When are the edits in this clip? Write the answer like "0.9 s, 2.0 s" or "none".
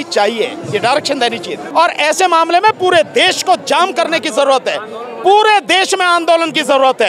1.6 s